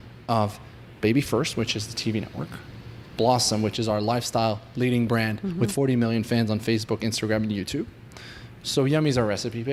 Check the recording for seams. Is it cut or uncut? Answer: uncut